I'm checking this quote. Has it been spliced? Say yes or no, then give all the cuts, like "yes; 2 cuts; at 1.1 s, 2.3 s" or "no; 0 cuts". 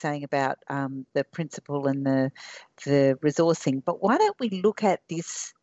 no; 0 cuts